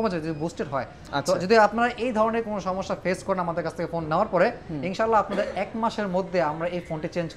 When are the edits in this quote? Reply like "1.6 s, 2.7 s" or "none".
none